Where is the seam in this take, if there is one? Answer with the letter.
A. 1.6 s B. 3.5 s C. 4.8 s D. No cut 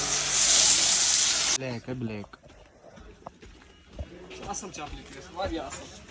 A